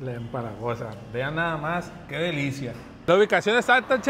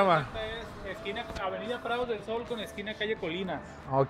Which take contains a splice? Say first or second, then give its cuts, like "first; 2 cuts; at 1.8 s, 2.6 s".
first; 1 cut; at 3.1 s